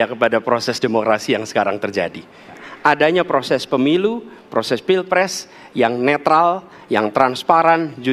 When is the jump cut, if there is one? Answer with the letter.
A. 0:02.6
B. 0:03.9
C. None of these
A